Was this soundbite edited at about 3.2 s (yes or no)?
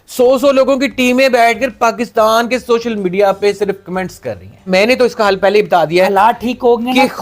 no